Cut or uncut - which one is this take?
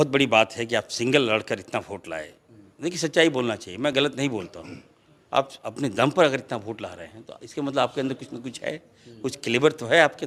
uncut